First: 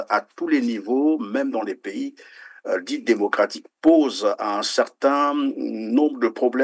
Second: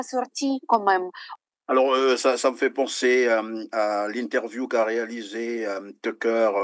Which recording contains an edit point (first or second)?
second